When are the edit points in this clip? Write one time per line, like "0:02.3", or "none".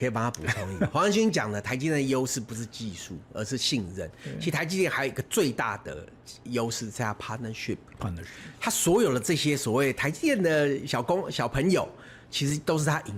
none